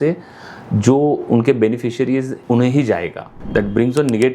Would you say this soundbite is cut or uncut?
cut